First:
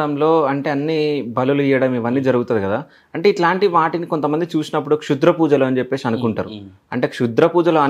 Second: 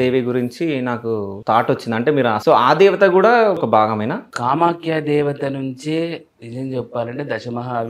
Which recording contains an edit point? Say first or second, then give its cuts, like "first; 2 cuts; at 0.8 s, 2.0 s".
second; 3 cuts; at 1.3 s, 2.4 s, 3.9 s